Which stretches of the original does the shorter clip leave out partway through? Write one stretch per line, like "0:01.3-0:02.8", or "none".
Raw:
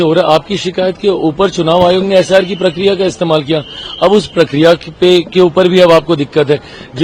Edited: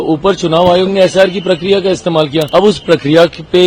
0:03.6-0:04.0